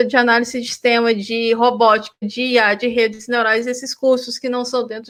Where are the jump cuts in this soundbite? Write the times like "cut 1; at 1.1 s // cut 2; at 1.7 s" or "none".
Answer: none